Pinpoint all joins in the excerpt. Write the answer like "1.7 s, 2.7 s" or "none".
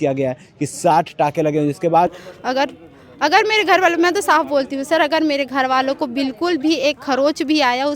2.2 s